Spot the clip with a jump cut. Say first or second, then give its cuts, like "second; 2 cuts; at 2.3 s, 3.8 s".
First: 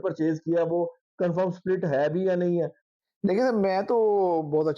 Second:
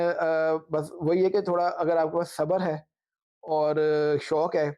first; 1 cut; at 2.8 s